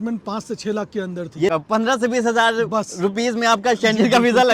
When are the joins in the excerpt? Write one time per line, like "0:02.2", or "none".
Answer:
0:01.5